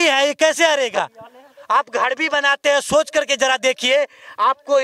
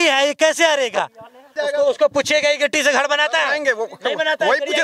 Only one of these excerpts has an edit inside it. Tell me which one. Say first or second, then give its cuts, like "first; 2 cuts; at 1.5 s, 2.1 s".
second; 1 cut; at 1.4 s